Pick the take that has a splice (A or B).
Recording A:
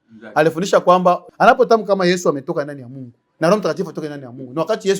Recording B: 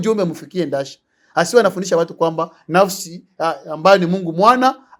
A